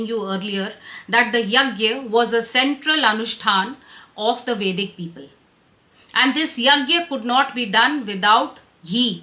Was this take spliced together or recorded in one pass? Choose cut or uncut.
uncut